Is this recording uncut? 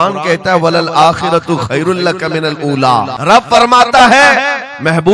no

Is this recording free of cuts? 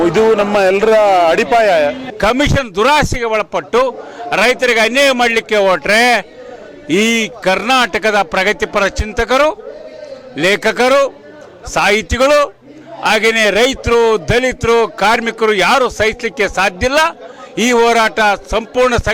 no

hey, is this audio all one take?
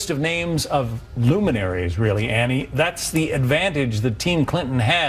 no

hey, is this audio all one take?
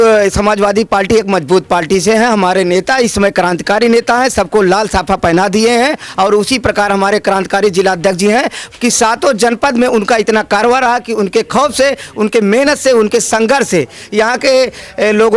yes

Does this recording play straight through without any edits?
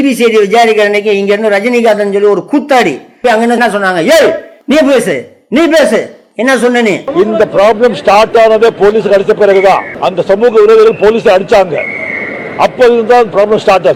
yes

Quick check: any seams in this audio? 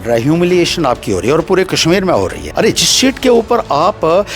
yes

